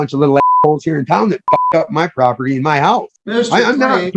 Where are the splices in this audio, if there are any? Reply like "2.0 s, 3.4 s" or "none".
3.2 s

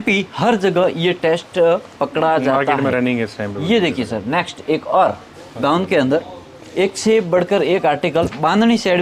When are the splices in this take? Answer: none

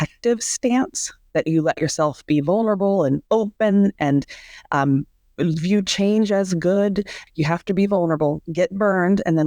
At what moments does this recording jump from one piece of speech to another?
7.2 s

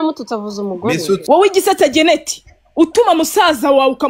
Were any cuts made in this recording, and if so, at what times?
1.2 s

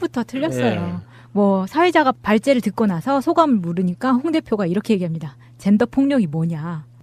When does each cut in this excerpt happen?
none

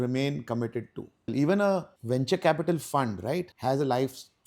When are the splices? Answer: 1.3 s, 1.9 s, 3.5 s

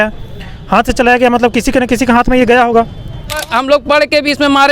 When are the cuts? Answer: 3.5 s

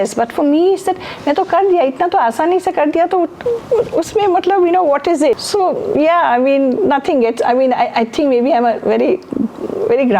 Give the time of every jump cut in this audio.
none

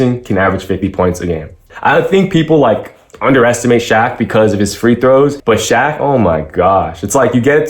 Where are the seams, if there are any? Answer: 1.7 s, 5.4 s

